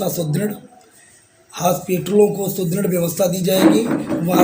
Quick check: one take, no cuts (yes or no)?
yes